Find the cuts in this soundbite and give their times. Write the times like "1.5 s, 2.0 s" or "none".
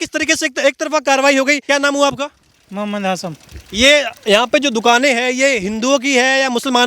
1.6 s